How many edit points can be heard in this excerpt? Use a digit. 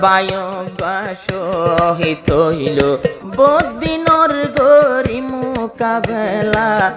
1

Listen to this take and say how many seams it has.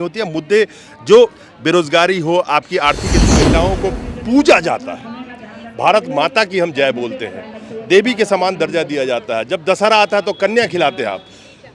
1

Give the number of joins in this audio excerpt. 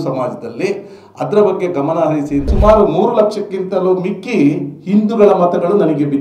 1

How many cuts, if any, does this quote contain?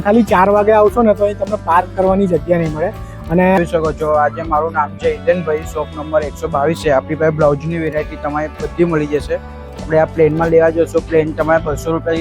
1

